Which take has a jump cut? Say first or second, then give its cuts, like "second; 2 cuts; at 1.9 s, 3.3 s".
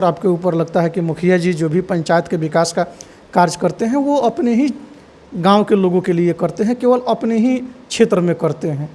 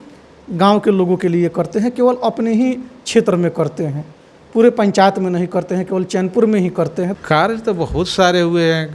second; 1 cut; at 7.1 s